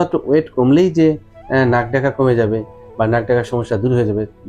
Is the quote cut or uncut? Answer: uncut